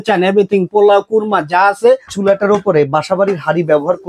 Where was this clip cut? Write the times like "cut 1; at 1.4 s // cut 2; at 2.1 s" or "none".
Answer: cut 1; at 2.1 s